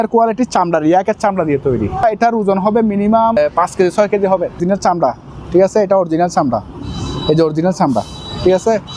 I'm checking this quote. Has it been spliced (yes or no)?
yes